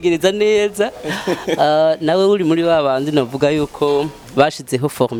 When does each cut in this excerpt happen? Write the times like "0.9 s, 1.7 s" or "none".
none